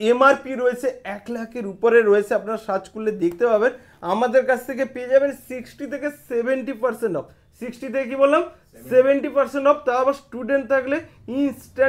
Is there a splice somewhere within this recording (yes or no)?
no